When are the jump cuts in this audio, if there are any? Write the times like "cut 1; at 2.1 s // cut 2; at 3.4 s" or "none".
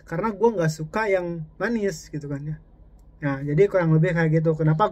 none